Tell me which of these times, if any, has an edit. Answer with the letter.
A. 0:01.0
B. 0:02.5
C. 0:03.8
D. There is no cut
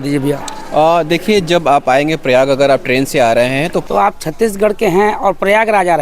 C